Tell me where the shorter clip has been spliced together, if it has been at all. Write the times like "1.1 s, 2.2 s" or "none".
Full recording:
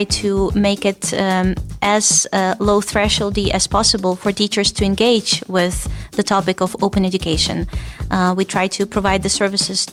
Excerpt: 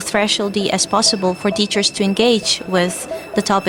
none

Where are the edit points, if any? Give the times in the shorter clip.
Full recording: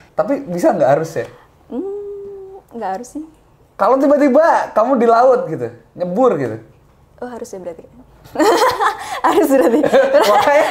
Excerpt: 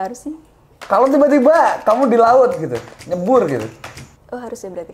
none

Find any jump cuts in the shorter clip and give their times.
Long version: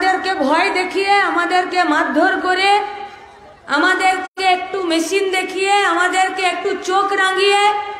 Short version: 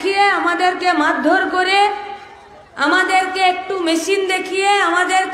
3.3 s

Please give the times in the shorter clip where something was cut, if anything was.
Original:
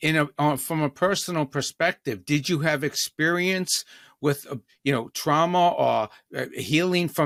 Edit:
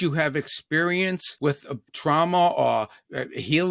1.8 s

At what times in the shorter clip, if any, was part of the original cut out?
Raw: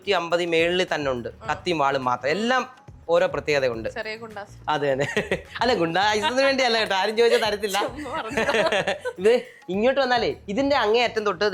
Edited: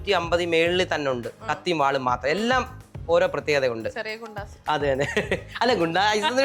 none

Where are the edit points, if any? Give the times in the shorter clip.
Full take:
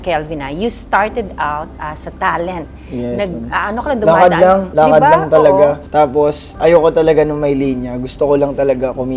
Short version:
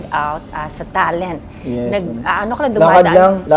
none

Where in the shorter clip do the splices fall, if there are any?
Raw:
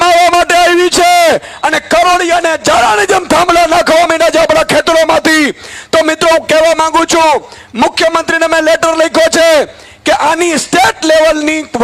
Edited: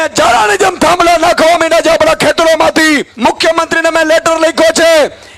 3.1 s

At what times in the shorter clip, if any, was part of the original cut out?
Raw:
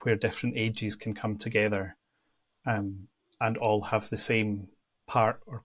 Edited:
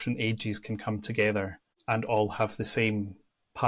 1.7 s

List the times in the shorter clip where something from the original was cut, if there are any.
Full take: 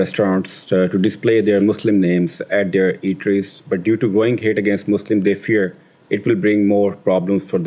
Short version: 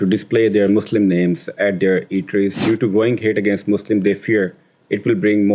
2.6 s

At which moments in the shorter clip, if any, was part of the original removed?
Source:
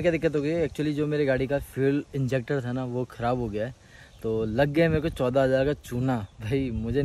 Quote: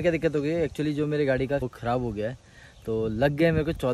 1.7 s

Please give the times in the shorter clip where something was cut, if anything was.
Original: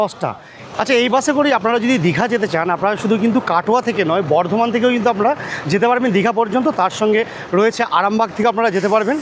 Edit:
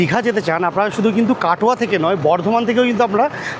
none

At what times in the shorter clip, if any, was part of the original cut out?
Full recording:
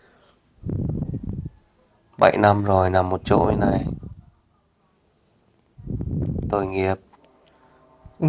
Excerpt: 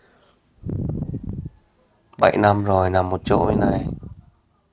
none

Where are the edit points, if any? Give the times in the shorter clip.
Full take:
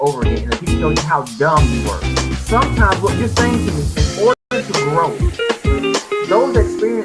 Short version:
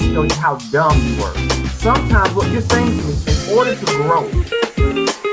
3.5 s

